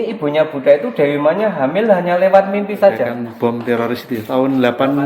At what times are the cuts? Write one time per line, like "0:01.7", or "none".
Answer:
0:03.2